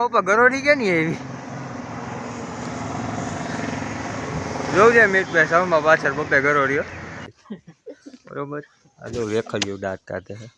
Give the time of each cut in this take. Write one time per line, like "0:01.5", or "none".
0:07.3